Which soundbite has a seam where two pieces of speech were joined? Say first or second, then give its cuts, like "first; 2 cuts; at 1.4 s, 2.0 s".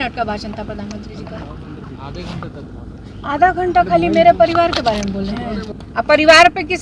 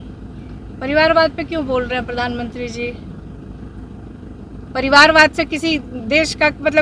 first; 1 cut; at 5.7 s